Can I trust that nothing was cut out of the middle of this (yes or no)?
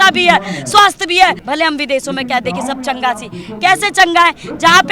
no